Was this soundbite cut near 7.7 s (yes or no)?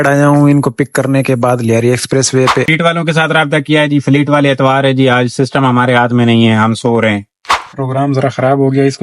yes